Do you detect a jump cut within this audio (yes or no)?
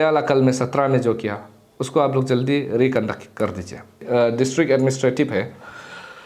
yes